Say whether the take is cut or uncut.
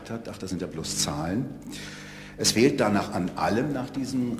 uncut